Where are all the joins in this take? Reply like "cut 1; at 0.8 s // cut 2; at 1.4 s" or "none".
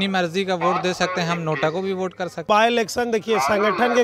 cut 1; at 2.4 s